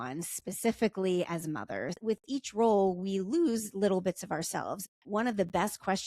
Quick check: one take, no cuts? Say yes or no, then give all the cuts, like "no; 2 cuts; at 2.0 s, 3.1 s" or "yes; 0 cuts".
no; 2 cuts; at 1.9 s, 4.8 s